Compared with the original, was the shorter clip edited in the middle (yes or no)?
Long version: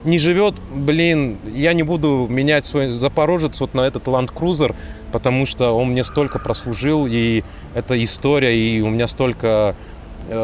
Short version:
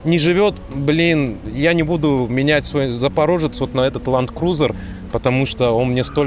no